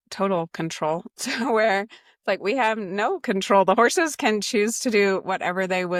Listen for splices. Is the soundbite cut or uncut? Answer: uncut